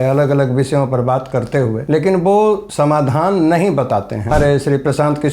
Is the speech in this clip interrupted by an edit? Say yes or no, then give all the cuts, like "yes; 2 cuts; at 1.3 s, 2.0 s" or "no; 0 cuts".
yes; 2 cuts; at 2.7 s, 4.3 s